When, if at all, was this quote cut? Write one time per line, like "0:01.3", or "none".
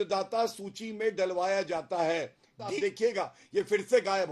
0:02.8